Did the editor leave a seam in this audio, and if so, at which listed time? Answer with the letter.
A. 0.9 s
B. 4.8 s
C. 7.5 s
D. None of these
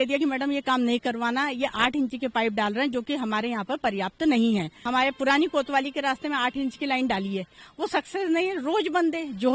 B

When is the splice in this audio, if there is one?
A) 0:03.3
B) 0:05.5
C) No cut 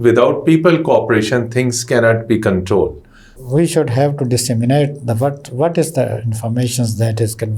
A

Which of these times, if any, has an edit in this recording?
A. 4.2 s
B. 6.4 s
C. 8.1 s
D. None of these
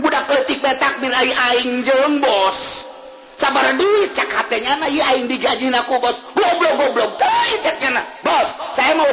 D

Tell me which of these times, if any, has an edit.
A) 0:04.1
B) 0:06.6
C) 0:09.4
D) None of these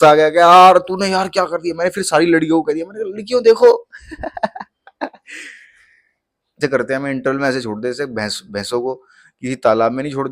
B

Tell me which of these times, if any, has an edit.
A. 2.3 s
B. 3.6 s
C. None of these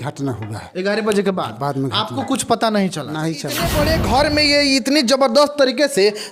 B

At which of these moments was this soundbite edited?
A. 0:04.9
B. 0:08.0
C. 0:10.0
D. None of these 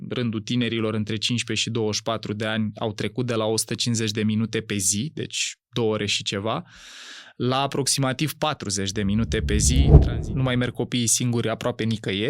C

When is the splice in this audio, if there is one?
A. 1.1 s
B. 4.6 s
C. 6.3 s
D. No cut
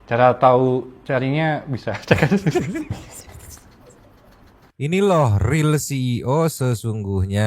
B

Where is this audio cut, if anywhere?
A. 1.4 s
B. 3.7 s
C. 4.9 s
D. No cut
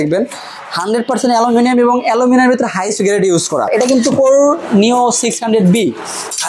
B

